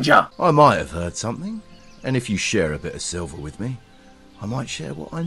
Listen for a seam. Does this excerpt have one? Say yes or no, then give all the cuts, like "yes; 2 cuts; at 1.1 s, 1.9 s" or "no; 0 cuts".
no; 0 cuts